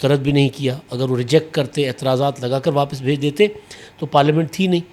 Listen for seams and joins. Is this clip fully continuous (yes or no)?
yes